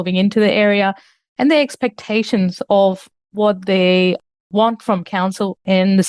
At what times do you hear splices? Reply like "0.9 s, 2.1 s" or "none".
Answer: none